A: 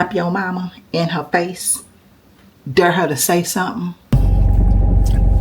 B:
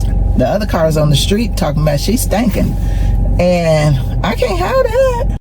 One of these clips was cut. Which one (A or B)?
A